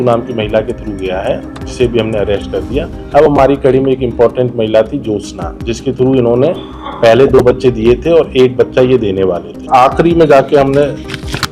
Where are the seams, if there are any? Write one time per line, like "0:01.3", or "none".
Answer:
0:09.6

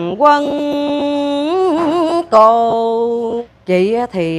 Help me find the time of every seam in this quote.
0:03.4

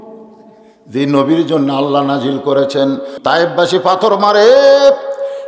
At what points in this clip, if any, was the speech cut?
0:03.1

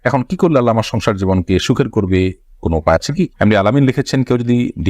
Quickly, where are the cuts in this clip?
0:03.3

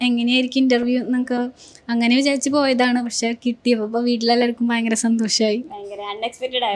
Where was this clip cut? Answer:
none

